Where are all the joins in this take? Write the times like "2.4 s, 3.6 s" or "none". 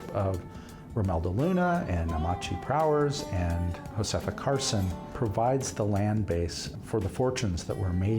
3.8 s, 5.0 s, 6.7 s